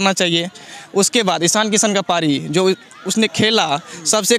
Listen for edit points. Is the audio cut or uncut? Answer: uncut